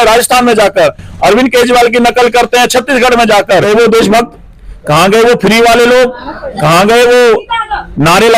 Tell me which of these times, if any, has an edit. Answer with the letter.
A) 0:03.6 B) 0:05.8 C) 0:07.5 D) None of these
A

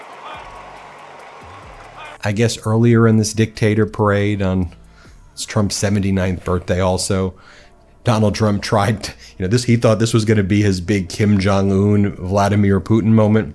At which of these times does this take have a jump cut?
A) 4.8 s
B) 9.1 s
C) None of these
C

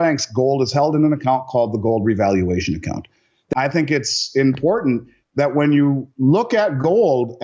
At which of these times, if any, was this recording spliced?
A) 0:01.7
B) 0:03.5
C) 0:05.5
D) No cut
B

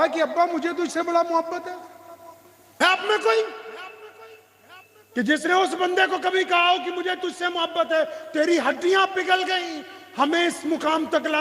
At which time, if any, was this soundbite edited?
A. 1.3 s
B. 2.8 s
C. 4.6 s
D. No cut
B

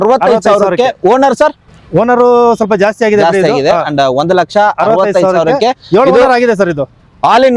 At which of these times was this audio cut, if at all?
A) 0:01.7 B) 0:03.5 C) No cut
C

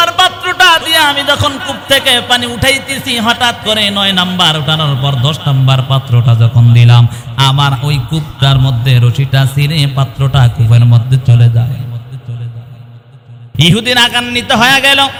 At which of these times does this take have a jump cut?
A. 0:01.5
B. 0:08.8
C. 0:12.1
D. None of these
D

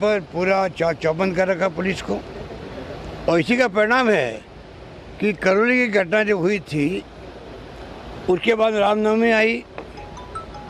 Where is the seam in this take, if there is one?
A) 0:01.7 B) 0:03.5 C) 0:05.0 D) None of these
D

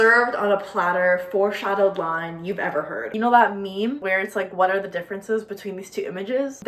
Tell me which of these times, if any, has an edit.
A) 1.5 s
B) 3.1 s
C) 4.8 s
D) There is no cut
B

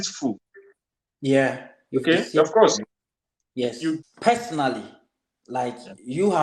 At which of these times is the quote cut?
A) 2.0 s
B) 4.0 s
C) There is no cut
B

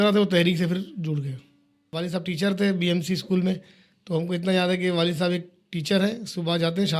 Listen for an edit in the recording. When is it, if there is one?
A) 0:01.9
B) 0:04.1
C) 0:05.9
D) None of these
A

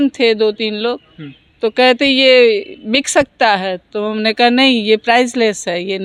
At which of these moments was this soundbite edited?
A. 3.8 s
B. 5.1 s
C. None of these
C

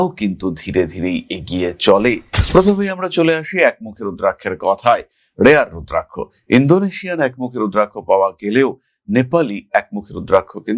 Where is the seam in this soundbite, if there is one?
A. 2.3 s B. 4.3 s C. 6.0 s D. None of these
A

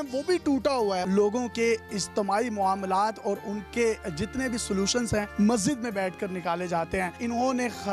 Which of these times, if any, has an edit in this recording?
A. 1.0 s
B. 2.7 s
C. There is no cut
A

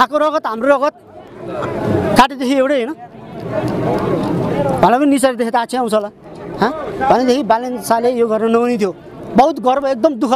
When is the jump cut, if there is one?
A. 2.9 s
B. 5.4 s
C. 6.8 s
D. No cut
D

